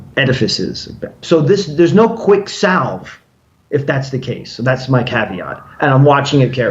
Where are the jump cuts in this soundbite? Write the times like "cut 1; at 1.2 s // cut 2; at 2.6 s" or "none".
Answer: cut 1; at 1.2 s

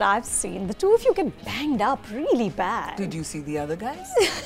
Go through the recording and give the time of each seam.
none

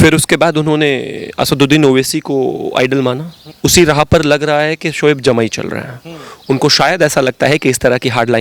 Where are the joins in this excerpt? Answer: none

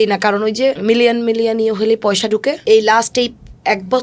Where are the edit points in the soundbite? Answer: cut 1; at 0.8 s // cut 2; at 2.6 s

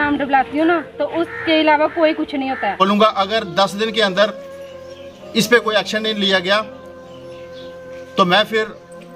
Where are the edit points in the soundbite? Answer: cut 1; at 2.8 s

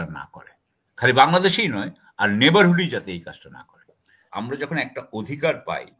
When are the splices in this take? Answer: cut 1; at 4.3 s

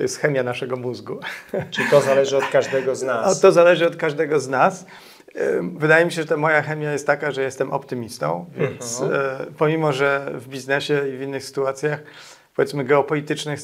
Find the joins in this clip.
none

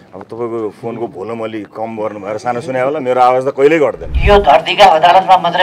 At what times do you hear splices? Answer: cut 1; at 4.1 s

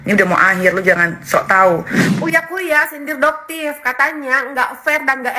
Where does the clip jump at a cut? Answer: cut 1; at 1.9 s

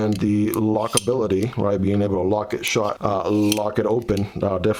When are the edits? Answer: none

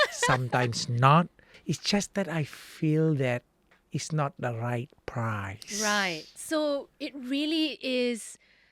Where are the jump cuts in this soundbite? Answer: cut 1; at 1.5 s

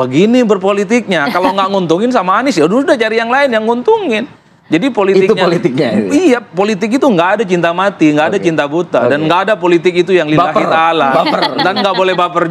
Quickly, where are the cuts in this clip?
none

